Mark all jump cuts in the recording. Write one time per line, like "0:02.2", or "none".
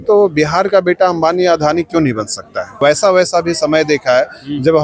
0:02.8